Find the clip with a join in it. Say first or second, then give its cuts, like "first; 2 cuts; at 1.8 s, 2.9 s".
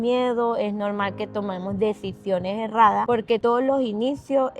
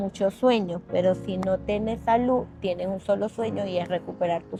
first; 1 cut; at 3.2 s